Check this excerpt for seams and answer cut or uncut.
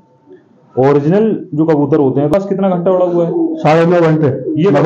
cut